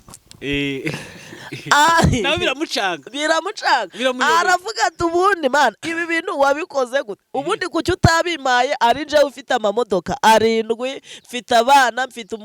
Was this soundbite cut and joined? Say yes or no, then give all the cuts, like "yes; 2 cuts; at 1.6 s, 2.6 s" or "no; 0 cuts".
no; 0 cuts